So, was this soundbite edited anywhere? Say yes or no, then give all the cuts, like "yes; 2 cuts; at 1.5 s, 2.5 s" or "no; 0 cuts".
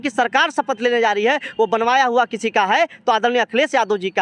no; 0 cuts